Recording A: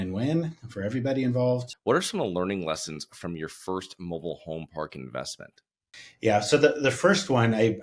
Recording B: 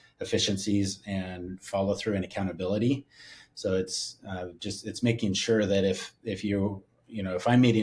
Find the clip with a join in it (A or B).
A